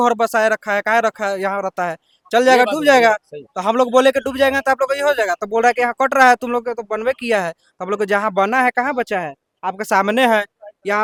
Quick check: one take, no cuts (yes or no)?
yes